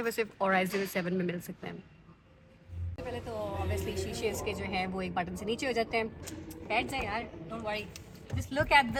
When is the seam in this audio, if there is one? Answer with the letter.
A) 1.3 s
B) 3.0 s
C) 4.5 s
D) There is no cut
D